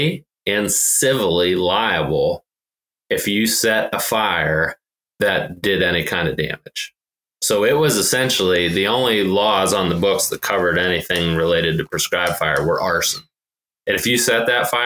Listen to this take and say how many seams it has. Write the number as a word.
zero